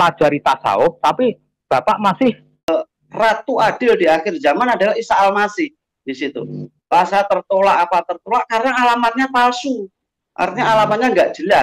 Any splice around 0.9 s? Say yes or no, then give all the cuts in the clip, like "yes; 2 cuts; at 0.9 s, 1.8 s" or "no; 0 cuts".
no; 2 cuts; at 2.7 s, 6.9 s